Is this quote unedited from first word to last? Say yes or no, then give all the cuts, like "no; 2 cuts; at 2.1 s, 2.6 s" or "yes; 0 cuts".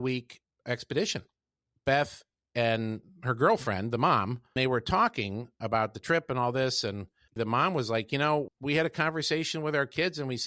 no; 3 cuts; at 4.6 s, 7.3 s, 8.5 s